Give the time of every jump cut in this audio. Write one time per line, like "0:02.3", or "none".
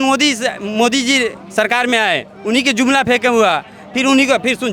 none